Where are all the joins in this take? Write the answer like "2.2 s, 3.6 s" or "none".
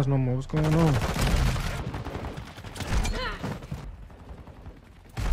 1.7 s, 3.8 s